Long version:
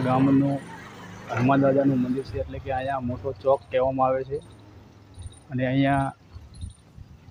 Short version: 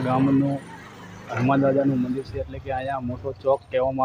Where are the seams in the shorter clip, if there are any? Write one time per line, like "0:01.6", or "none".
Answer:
none